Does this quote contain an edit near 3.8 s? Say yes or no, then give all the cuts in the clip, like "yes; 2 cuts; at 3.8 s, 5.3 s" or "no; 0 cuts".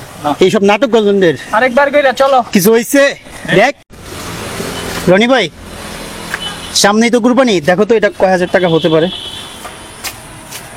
yes; 1 cut; at 3.8 s